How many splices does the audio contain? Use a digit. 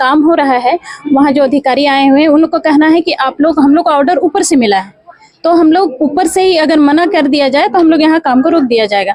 0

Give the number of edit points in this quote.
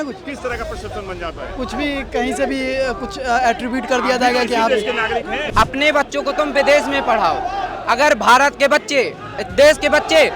1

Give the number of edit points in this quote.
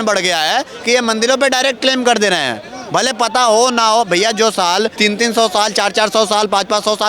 1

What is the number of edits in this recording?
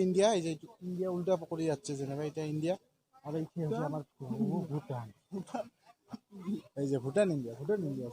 0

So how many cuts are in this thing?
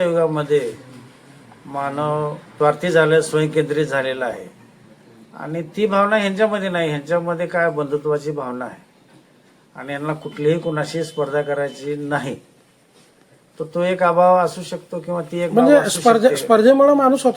1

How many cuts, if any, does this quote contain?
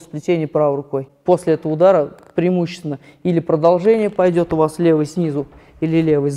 1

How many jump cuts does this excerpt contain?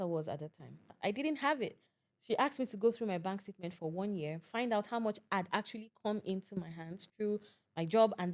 1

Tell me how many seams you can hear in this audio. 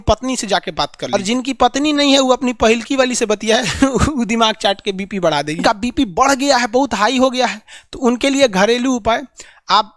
2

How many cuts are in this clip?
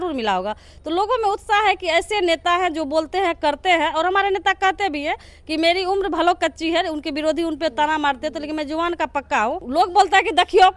1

